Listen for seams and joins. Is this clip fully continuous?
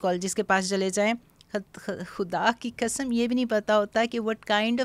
yes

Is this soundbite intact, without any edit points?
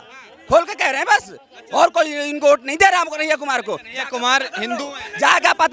yes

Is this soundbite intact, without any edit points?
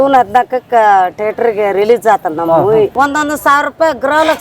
no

